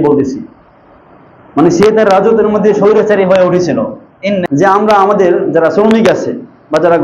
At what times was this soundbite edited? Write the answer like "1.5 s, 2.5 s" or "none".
4.4 s